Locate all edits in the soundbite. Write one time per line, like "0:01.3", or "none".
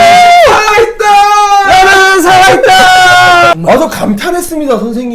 0:03.5